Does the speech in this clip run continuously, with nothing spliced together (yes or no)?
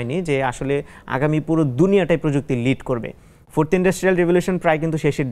yes